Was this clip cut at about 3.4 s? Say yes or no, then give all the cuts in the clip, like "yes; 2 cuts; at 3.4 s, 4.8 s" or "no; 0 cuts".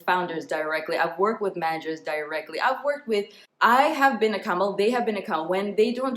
yes; 1 cut; at 3.4 s